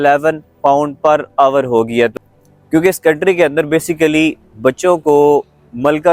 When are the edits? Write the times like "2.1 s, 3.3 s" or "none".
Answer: 2.3 s